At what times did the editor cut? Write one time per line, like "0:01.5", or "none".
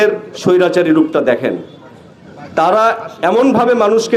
none